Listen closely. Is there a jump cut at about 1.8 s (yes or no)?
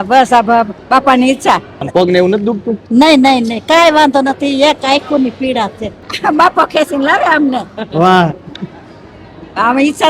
yes